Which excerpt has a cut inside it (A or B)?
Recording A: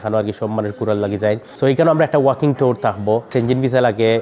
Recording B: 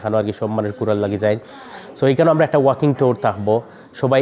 A